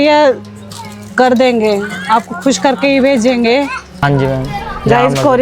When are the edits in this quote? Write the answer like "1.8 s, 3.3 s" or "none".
4.0 s